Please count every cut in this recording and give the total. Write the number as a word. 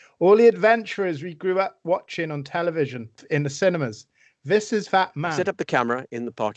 two